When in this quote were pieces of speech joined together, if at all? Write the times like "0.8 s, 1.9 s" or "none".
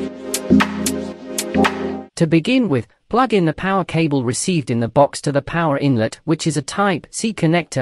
2.1 s